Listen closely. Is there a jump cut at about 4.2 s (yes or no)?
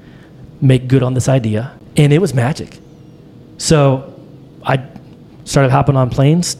no